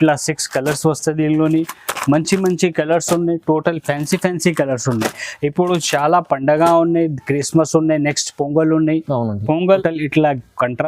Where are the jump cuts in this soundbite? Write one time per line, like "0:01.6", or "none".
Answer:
0:09.8